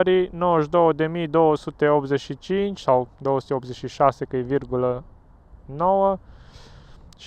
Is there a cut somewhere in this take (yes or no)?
no